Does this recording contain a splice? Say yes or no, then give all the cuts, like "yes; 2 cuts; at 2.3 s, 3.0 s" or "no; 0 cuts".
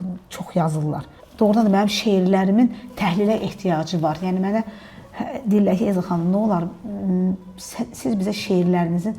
yes; 1 cut; at 1.2 s